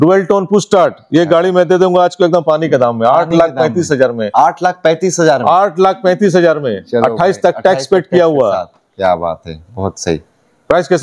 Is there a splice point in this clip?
no; 0 cuts

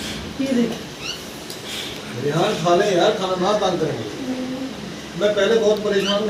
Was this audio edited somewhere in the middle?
no; 0 cuts

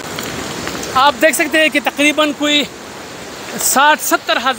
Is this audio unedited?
yes; 0 cuts

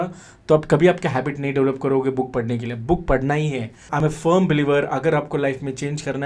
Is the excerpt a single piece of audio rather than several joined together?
no; 1 cut; at 3.9 s

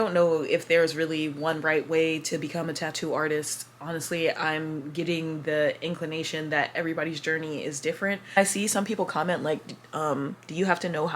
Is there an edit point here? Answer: yes; 1 cut; at 8.4 s

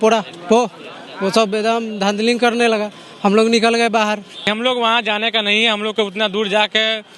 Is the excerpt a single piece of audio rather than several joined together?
no; 1 cut; at 4.5 s

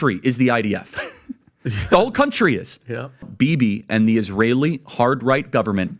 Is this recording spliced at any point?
yes; 1 cut; at 3.2 s

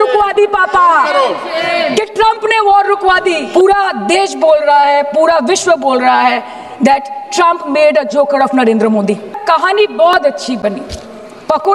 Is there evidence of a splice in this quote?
yes; 2 cuts; at 3.4 s, 9.4 s

